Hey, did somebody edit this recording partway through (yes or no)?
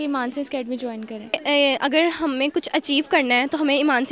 yes